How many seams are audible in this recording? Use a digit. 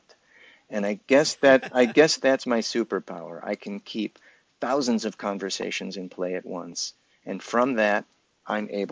0